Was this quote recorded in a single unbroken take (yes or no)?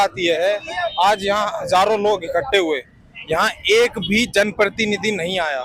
yes